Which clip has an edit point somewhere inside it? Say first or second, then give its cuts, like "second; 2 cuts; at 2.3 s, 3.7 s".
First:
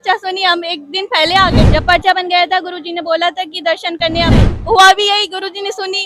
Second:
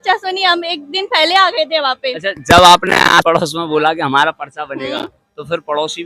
first; 2 cuts; at 1.6 s, 4.3 s